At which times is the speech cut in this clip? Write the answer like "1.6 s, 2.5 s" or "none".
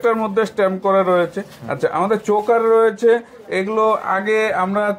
none

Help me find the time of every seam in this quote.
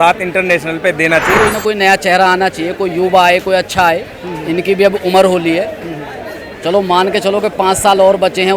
1.3 s

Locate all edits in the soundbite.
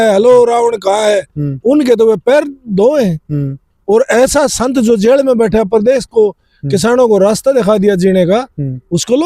none

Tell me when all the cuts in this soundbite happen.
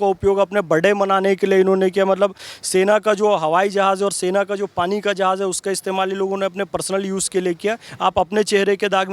7.9 s

